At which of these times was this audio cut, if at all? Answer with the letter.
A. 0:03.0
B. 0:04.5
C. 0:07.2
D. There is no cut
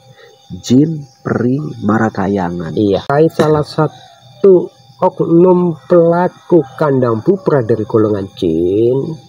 A